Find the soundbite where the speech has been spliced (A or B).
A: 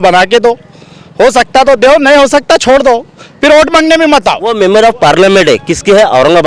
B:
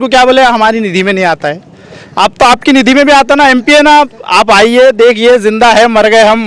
A